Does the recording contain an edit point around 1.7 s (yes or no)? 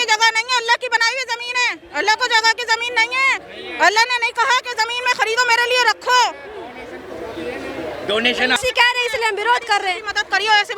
no